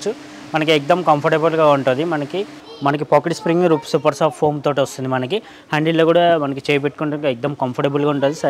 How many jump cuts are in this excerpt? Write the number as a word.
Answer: one